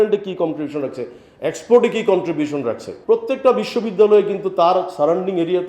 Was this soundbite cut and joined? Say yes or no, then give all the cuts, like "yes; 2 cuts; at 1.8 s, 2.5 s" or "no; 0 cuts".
yes; 1 cut; at 2.9 s